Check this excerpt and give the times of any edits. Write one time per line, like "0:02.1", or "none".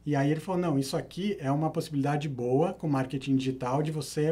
none